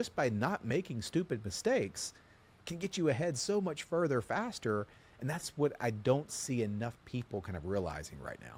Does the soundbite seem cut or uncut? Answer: uncut